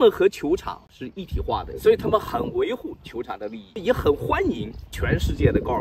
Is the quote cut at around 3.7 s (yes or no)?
yes